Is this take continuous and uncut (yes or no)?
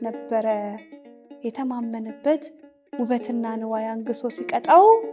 yes